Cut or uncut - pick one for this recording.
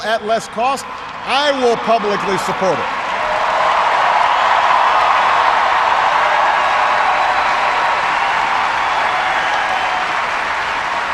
cut